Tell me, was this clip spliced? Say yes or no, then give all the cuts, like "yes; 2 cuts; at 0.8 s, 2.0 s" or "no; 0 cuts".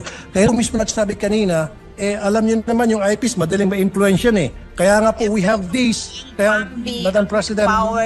no; 0 cuts